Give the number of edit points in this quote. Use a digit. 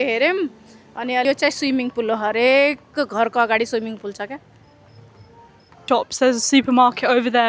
2